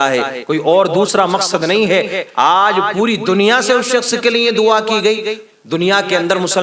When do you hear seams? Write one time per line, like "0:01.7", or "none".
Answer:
none